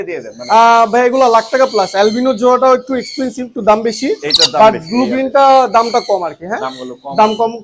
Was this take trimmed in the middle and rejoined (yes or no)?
no